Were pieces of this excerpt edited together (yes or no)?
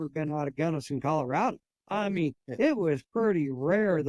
yes